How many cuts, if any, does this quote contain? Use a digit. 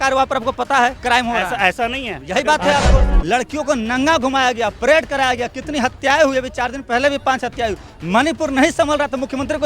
1